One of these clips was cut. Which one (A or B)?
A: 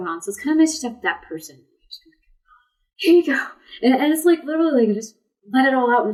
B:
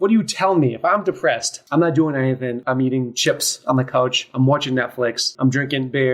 B